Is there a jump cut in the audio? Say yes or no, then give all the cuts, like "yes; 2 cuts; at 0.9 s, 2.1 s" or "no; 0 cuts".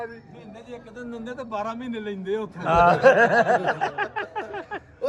no; 0 cuts